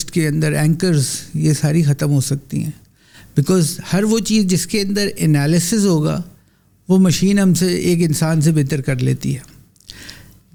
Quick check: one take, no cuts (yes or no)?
yes